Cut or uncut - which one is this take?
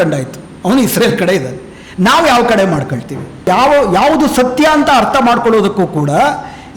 cut